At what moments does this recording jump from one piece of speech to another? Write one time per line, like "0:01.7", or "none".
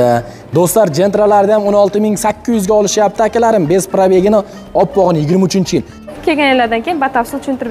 0:06.1